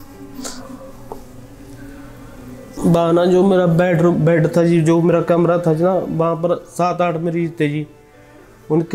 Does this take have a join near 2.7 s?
yes; 1 cut; at 2.7 s

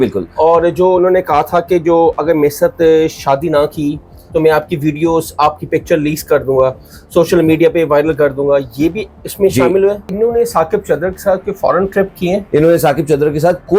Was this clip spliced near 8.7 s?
no; 2 cuts; at 10.1 s, 12.4 s

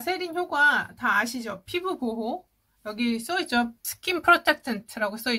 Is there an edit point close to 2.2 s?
no; 1 cut; at 3.8 s

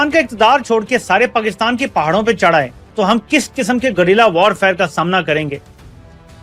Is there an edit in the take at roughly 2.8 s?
yes; 1 cut; at 2.8 s

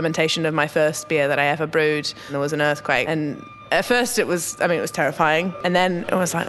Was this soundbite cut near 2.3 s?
yes; 2 cuts; at 2.3 s, 5.5 s

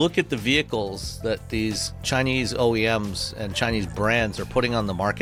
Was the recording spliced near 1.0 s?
no; 0 cuts

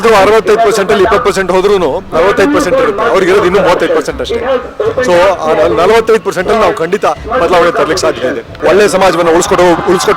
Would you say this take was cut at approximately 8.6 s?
yes; 1 cut; at 8.6 s

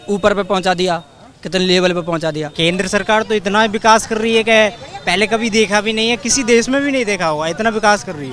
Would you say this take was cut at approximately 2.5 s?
yes; 1 cut; at 2.5 s

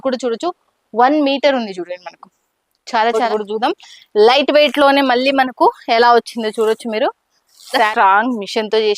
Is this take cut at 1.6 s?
no; 2 cuts; at 3.3 s, 7.9 s

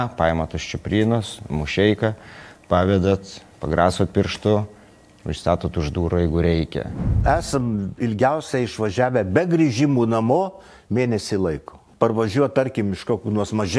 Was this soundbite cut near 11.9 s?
yes; 2 cuts; at 7.1 s, 11.9 s

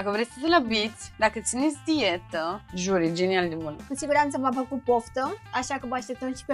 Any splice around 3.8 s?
yes; 3 cuts; at 1.0 s, 2.7 s, 3.8 s

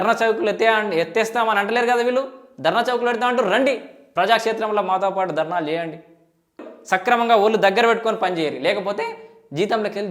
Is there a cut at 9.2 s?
no; 1 cut; at 6.7 s

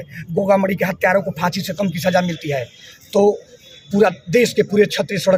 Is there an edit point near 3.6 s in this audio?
no; 0 cuts

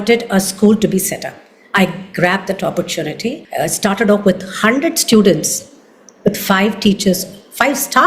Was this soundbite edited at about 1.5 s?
no; 1 cut; at 3.4 s

